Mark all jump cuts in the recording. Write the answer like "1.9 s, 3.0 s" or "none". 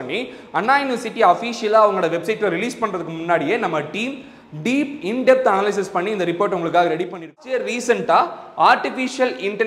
7.4 s

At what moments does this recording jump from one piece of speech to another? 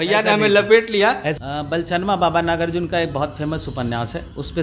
1.4 s

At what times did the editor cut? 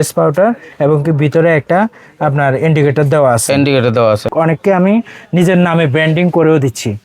4.3 s

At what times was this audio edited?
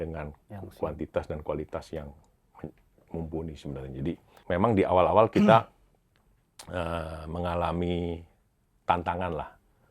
4.4 s

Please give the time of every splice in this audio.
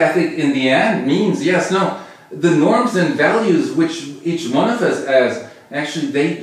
none

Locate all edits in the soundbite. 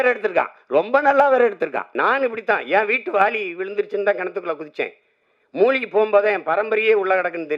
1.8 s

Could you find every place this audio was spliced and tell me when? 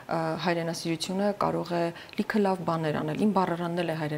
none

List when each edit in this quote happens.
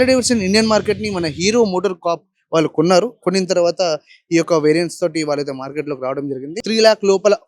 6.6 s

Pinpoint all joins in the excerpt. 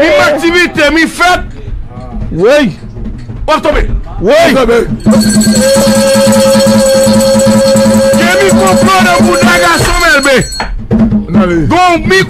none

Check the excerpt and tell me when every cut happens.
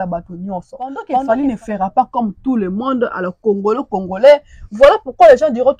1.1 s

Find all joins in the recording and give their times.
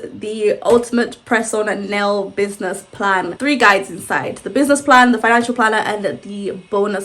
3.3 s

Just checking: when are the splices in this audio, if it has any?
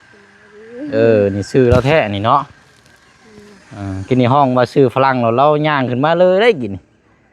none

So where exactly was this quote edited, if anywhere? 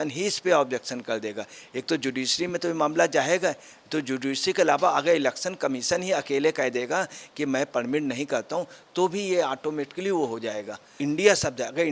10.9 s

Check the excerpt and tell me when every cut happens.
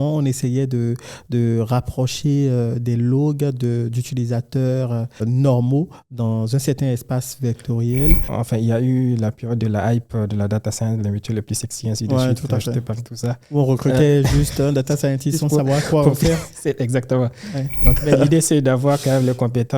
5.2 s, 8.3 s, 18.0 s

